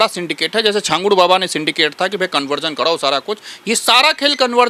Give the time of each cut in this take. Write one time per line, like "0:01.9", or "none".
none